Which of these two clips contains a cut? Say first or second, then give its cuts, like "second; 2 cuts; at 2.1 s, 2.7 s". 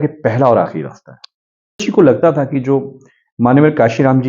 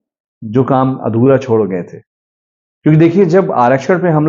first; 1 cut; at 1.8 s